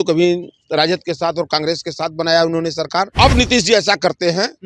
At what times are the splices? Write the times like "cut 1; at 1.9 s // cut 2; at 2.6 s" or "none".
cut 1; at 3.1 s